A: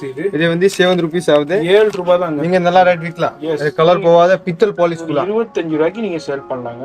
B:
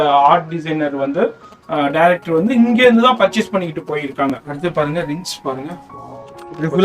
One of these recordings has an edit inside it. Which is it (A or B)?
B